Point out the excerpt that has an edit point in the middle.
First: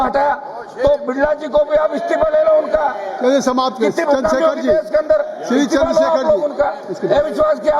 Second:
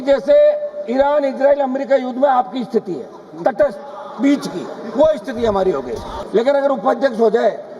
second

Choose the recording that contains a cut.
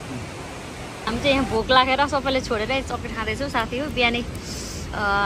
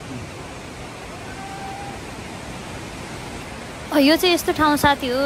first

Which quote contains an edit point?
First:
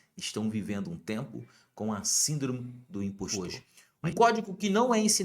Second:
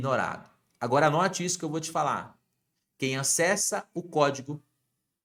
first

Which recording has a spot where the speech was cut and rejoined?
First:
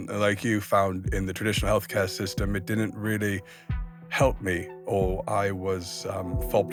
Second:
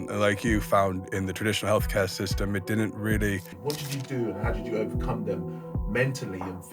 second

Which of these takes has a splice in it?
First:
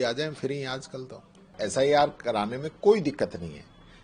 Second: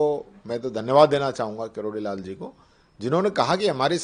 first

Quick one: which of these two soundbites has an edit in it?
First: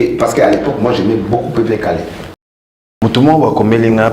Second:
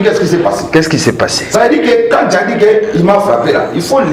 first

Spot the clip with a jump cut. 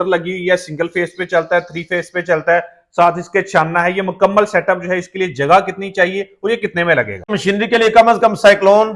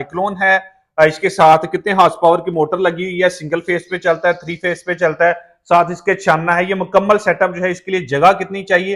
first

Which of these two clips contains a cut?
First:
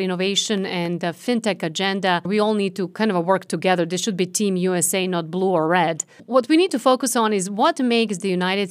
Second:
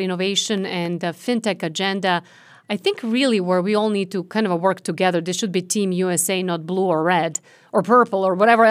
first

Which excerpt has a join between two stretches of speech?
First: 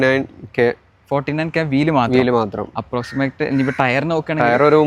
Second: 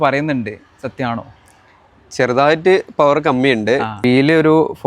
second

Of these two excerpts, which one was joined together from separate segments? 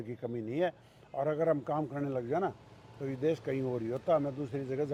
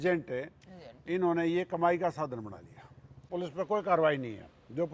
second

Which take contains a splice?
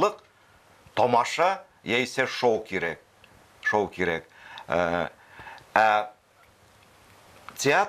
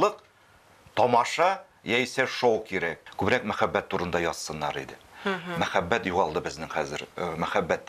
second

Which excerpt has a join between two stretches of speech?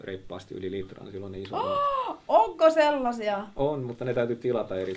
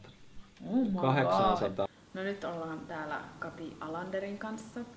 second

